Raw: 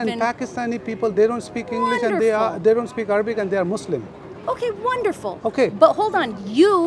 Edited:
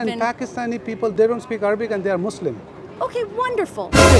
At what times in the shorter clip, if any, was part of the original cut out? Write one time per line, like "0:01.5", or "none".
0:01.1